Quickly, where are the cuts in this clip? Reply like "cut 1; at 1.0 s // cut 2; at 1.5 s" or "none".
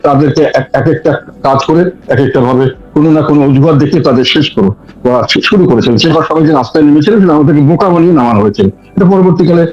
cut 1; at 6.1 s